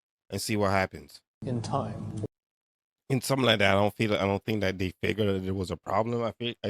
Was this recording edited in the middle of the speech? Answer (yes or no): yes